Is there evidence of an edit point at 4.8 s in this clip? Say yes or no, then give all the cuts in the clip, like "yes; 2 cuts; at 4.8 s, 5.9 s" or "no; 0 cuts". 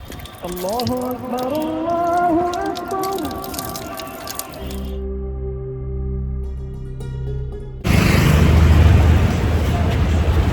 no; 1 cut; at 7.9 s